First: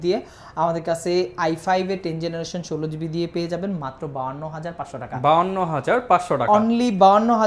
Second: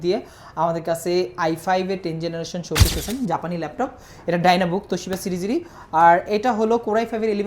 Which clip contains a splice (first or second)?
second